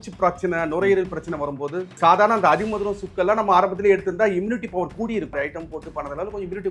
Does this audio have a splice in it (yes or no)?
yes